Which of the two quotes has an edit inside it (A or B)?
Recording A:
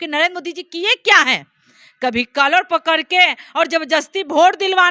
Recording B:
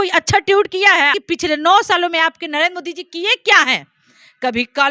B